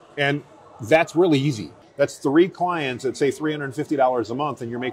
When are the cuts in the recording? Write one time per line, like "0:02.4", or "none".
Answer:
0:01.8